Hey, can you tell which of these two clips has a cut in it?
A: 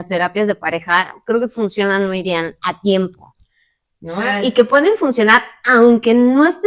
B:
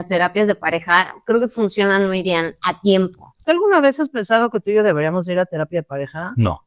B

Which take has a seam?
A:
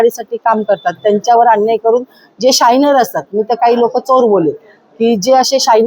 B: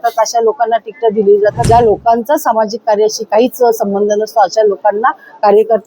B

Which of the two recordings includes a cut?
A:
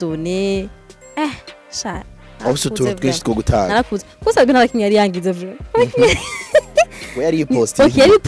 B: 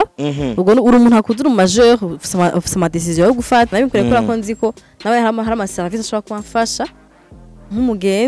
B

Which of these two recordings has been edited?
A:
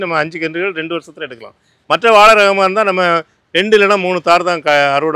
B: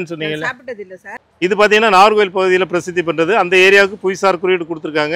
B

